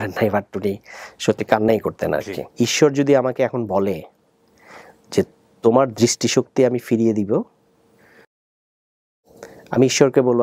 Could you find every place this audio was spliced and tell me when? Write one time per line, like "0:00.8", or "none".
0:02.4
0:08.7